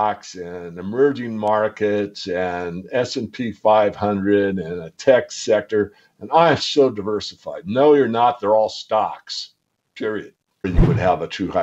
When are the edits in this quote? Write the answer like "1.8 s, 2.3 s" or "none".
10.6 s